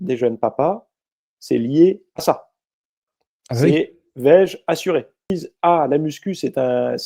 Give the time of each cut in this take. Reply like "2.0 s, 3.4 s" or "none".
5.4 s